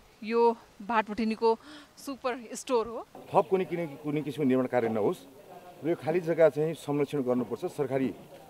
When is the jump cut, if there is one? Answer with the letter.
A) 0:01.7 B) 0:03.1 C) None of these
B